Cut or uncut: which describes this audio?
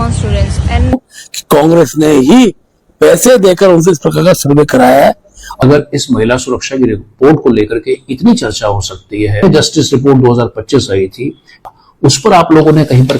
cut